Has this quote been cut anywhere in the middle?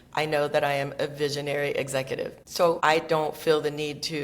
yes; 1 cut; at 2.6 s

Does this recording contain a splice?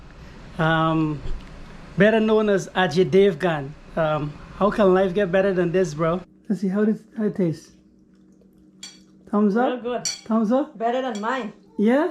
yes; 1 cut; at 6.3 s

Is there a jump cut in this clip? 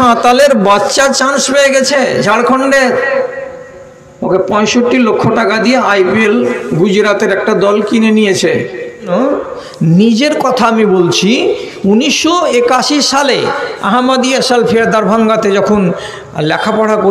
yes; 1 cut; at 9.1 s

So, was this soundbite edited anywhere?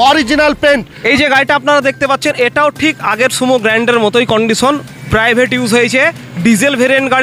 no; 0 cuts

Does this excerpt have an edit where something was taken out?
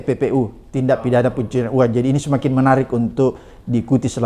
no; 0 cuts

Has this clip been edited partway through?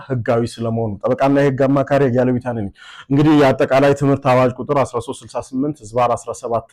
no; 0 cuts

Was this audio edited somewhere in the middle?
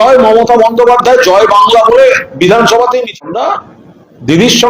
yes; 1 cut; at 3.3 s

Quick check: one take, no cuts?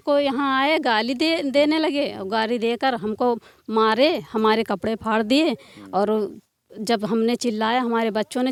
yes; 0 cuts

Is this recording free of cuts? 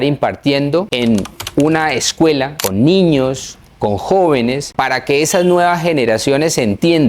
no; 3 cuts; at 0.9 s, 2.6 s, 4.7 s

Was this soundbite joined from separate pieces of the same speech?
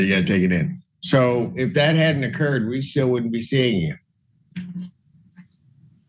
no; 0 cuts

